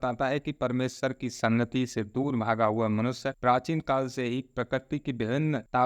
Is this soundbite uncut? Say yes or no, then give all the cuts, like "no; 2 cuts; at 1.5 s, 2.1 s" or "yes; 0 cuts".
yes; 0 cuts